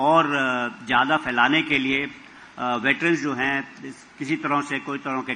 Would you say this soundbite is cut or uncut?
uncut